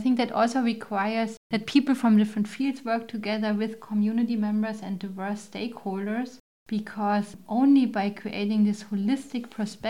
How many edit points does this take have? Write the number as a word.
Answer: one